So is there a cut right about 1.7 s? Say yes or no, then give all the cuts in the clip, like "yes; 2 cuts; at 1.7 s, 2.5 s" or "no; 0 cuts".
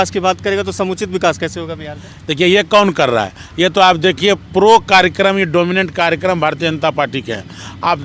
no; 0 cuts